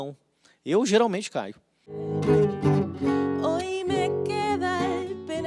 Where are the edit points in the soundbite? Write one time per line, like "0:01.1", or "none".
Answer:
0:02.1